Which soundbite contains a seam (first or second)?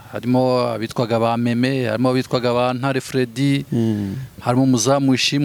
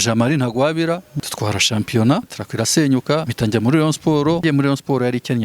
second